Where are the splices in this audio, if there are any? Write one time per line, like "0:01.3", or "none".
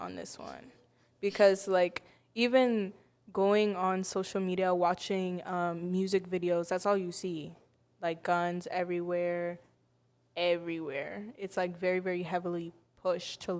none